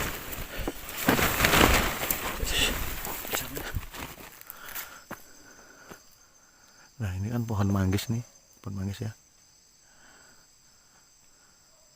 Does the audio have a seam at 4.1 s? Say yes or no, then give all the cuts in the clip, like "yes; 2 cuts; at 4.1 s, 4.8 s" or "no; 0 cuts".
yes; 1 cut; at 4.1 s